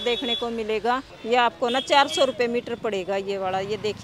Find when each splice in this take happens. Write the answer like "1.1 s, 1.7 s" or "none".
1.1 s